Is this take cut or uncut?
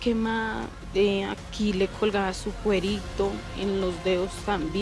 uncut